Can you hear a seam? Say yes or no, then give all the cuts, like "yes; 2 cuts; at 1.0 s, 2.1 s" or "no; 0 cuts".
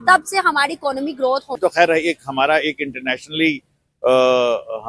yes; 1 cut; at 1.6 s